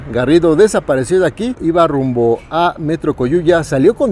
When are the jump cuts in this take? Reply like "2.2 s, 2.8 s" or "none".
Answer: 1.6 s